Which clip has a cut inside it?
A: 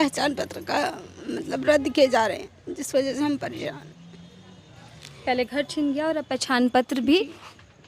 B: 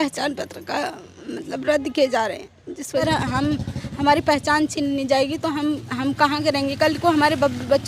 B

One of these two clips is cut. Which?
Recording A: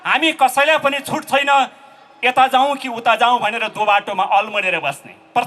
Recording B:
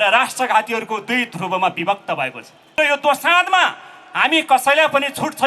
B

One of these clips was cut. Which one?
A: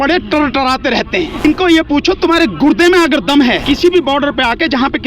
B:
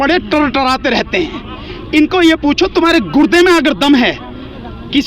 A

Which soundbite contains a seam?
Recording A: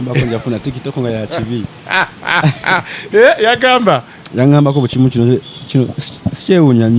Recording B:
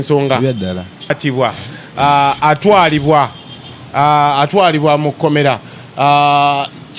B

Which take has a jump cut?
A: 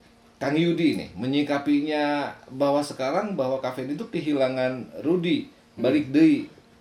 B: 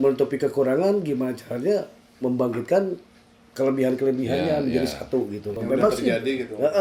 B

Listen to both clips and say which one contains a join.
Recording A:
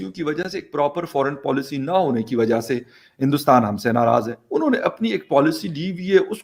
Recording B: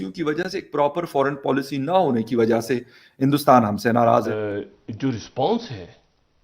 B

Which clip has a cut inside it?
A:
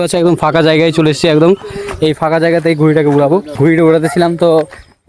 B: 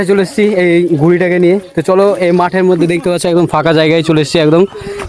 A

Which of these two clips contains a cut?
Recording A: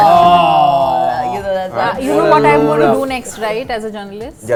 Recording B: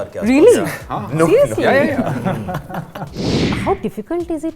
B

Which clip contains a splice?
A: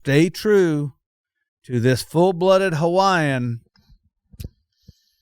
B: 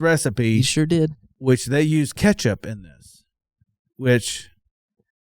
B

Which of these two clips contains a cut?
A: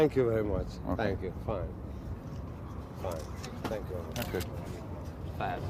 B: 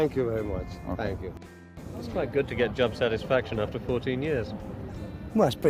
B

